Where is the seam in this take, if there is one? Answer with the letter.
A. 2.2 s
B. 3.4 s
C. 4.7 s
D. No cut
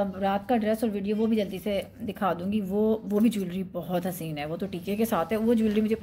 D